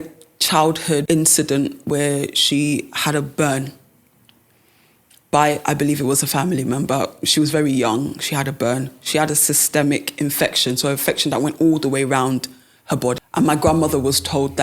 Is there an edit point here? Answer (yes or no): yes